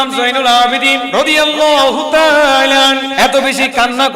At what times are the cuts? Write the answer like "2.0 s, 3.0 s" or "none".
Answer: 1.1 s, 3.1 s